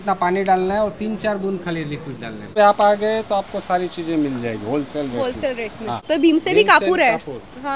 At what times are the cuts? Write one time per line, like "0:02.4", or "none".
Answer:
0:02.5
0:06.0